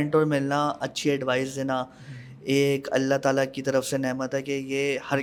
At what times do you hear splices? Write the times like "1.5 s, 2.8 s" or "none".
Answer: none